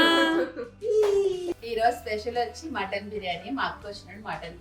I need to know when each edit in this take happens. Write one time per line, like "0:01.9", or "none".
0:01.5